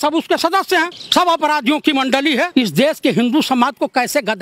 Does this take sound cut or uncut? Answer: cut